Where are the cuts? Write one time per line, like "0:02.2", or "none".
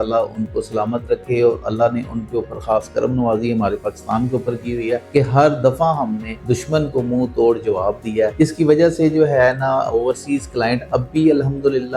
none